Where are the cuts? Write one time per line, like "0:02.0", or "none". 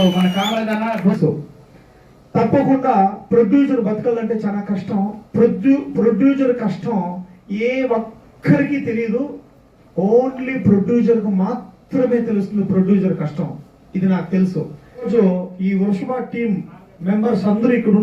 0:01.2
0:15.1

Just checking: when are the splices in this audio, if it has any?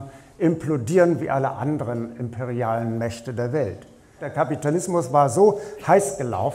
0:04.2

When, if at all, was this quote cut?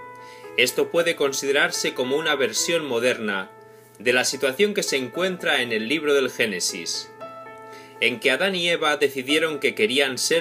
none

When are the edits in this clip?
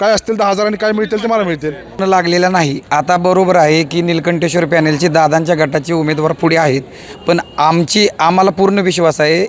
0:02.0

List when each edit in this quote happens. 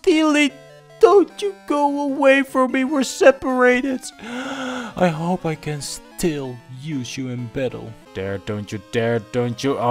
0:08.0

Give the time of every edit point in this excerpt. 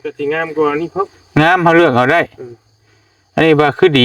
none

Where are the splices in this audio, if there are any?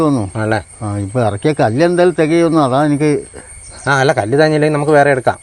none

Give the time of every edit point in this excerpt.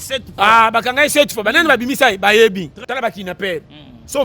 0:02.8

